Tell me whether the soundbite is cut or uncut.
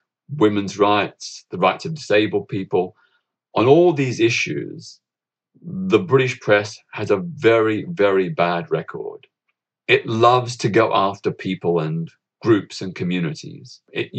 uncut